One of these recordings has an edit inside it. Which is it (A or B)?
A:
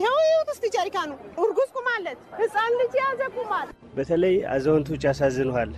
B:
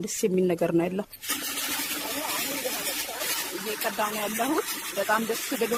A